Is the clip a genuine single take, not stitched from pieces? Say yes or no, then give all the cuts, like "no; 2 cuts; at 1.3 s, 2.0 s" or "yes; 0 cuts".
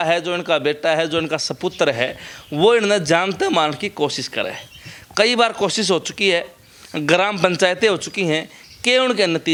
yes; 0 cuts